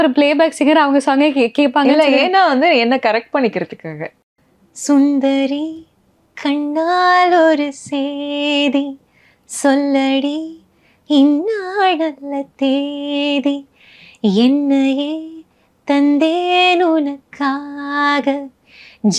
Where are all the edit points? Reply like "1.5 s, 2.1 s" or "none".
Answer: 4.2 s

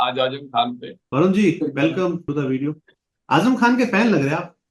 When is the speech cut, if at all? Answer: 0.9 s, 2.3 s

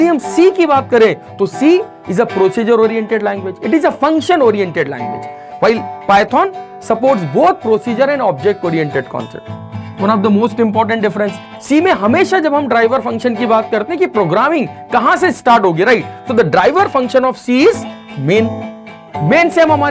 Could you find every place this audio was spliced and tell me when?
9.9 s, 11.5 s

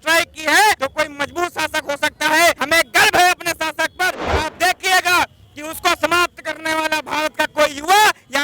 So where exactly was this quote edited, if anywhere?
0.8 s, 2.6 s, 4.2 s

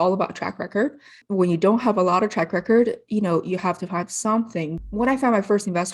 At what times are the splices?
1.2 s, 4.8 s

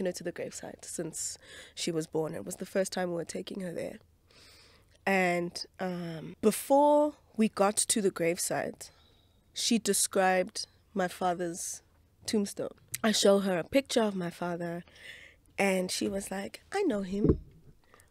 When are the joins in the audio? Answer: 6.2 s, 12.8 s

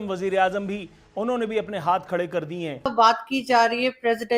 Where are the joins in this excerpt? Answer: 2.9 s

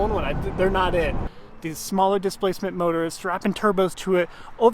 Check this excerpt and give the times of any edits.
1.3 s

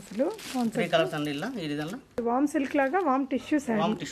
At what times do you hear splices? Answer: 2.2 s

